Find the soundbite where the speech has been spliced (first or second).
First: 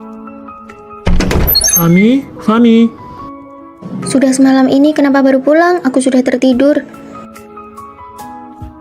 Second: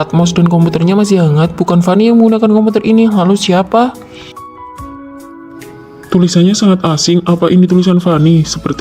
first